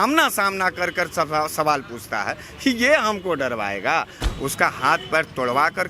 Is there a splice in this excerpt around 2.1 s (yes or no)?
no